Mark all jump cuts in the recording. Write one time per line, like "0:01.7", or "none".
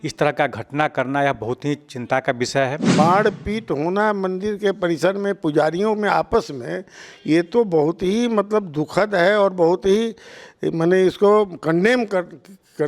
0:02.9